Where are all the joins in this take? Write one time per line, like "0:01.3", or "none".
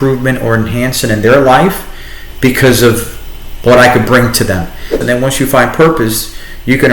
0:05.0